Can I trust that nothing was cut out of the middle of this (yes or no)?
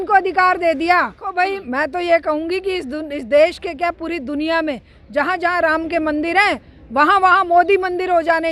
no